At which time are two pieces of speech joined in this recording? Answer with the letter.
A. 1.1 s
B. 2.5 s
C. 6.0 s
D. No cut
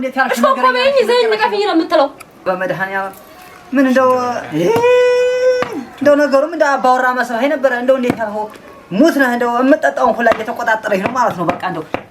B